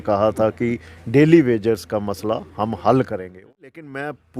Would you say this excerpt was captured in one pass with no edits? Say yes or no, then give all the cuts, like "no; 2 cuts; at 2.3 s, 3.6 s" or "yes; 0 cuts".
no; 1 cut; at 3.5 s